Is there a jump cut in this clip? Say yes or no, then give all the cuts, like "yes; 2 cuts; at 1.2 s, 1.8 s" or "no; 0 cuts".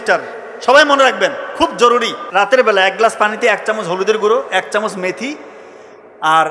yes; 1 cut; at 2.2 s